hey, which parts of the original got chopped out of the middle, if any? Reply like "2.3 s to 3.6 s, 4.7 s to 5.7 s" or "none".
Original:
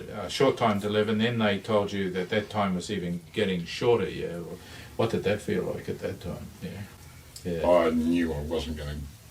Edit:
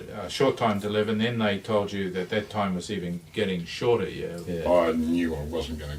4.4 s to 7.4 s

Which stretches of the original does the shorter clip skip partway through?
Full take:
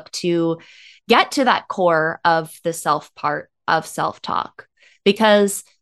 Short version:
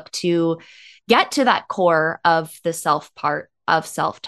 none

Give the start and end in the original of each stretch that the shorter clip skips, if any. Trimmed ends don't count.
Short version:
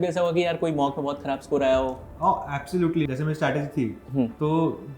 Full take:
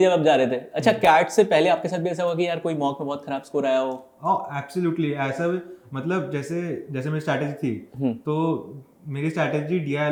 5.1 s to 6.9 s

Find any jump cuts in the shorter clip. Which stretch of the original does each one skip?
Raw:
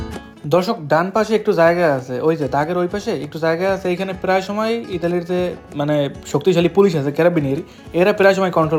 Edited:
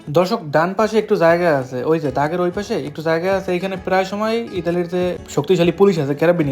5.6 s to 6.2 s

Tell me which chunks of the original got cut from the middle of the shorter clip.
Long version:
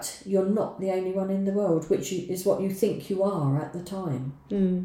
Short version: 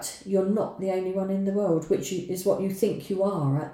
none

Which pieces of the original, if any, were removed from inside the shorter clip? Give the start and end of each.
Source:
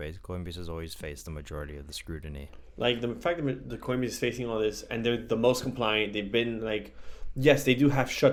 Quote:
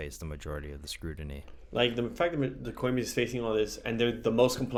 none

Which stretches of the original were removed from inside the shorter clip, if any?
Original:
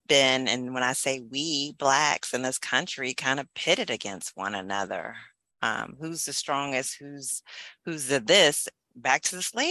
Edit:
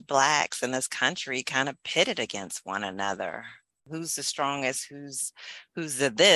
5.5 s to 5.9 s

